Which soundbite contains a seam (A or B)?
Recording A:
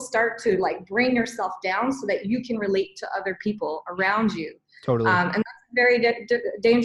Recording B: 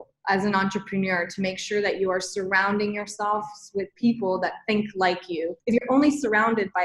B